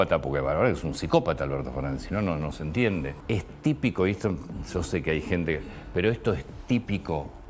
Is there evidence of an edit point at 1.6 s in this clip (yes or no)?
no